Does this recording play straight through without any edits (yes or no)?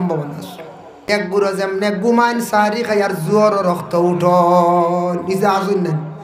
no